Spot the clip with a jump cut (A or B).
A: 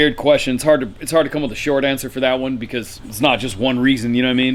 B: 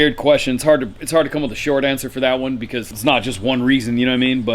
B